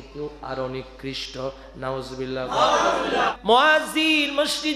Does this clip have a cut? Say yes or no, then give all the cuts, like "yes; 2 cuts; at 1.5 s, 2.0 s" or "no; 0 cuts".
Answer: yes; 1 cut; at 3.3 s